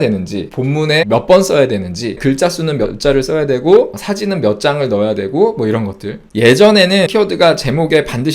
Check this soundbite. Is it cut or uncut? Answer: cut